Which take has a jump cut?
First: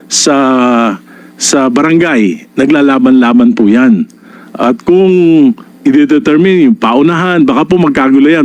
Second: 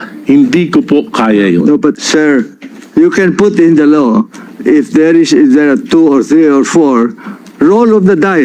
second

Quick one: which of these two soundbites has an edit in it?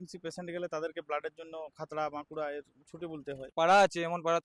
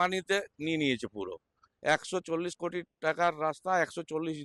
first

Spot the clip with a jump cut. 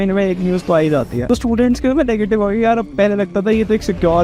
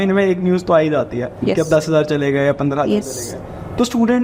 first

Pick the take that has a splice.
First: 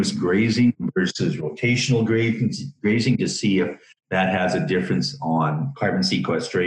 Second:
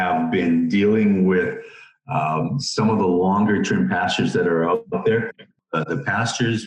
second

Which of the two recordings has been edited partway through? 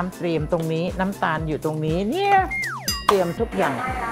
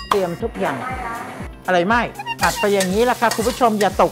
second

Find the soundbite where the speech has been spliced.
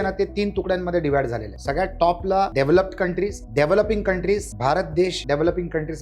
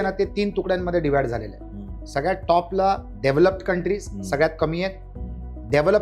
first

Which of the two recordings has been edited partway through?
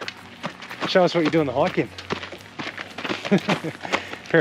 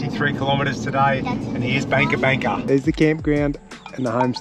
second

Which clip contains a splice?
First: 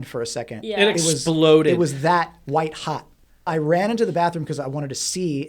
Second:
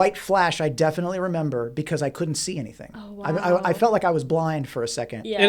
first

